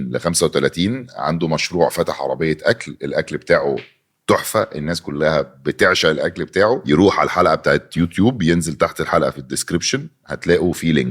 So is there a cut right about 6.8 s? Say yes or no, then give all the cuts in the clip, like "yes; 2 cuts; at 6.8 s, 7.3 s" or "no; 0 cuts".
yes; 1 cut; at 6.8 s